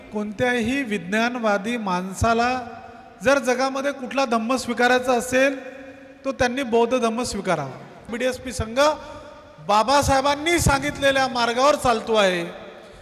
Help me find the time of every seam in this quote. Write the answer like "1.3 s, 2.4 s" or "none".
8.0 s

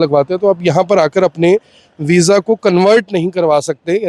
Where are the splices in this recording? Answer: none

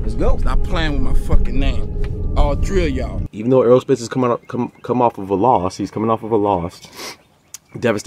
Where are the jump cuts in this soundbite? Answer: 3.2 s

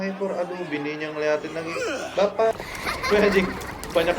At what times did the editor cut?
2.5 s

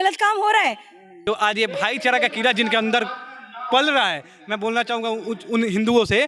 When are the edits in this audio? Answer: 1.1 s

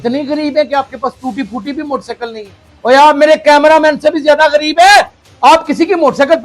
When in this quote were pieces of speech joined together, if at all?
5.2 s

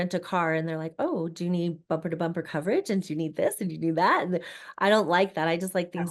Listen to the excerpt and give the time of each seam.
none

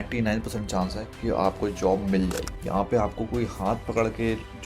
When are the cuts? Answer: 2.6 s

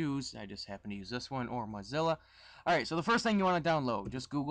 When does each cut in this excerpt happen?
none

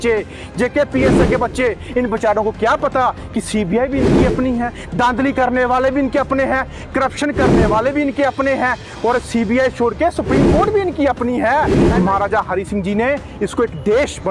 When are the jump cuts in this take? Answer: 11.8 s

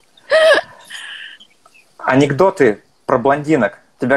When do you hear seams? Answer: 1.3 s

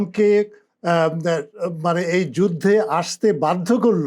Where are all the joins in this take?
none

